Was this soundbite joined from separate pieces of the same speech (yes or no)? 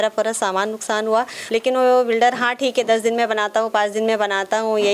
yes